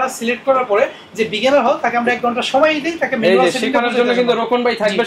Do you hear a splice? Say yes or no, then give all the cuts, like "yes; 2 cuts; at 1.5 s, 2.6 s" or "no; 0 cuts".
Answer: no; 0 cuts